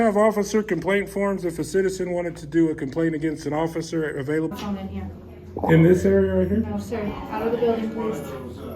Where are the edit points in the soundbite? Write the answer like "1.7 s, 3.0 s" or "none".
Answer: 4.5 s